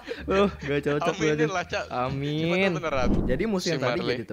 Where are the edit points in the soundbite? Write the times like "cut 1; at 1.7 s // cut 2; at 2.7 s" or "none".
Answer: cut 1; at 3.2 s

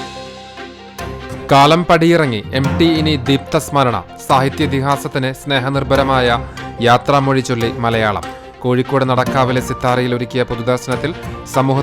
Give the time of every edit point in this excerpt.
cut 1; at 1.4 s

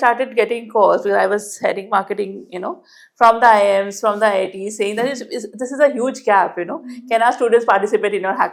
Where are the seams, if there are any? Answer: none

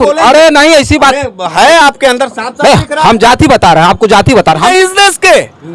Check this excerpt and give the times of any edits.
cut 1; at 4.7 s

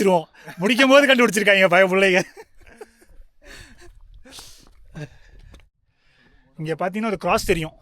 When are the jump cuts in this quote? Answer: cut 1; at 5.8 s

